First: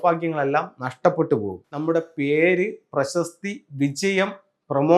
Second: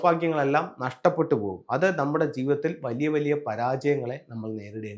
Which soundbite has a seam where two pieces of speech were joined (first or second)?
first